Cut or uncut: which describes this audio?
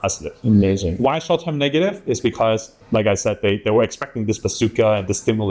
cut